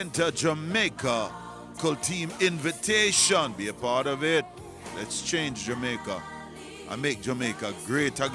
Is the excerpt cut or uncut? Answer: cut